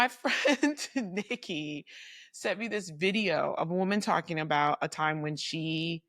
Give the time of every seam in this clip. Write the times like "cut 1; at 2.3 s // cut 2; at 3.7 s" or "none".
none